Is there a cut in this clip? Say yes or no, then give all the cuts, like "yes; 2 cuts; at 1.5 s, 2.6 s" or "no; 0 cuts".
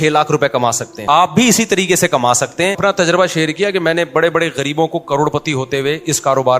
yes; 2 cuts; at 0.9 s, 2.8 s